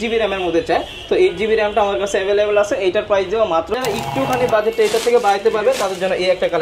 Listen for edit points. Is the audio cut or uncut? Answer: cut